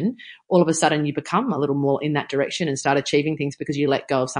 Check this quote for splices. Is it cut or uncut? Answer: uncut